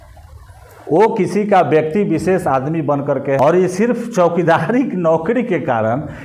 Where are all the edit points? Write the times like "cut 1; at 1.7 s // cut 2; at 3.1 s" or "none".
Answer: cut 1; at 3.4 s